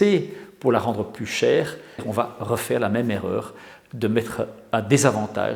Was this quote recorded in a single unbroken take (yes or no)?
no